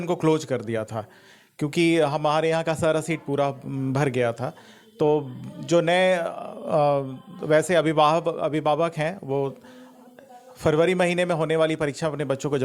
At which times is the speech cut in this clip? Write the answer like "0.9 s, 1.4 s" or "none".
none